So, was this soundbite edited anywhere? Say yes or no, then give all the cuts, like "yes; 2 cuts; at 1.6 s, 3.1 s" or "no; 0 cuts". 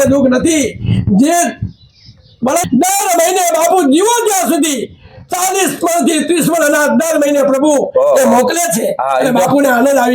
yes; 1 cut; at 2.6 s